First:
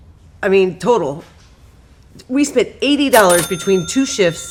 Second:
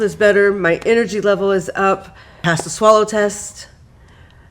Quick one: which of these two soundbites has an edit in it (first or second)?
second